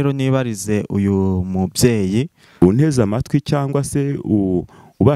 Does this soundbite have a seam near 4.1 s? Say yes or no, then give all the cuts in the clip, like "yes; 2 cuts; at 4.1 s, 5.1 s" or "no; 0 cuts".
no; 1 cut; at 2.4 s